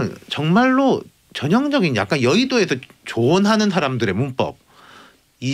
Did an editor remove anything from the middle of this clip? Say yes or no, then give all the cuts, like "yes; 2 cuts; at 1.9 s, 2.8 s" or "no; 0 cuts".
no; 0 cuts